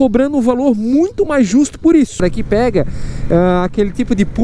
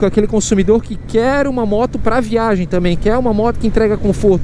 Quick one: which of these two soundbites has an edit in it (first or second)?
first